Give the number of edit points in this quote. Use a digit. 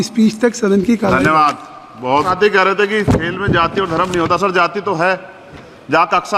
1